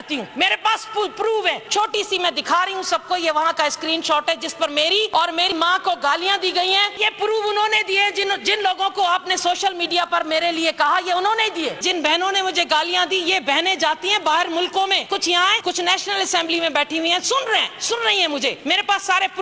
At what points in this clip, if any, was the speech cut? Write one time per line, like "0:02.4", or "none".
0:01.7
0:05.1
0:07.0
0:11.8
0:15.4
0:18.6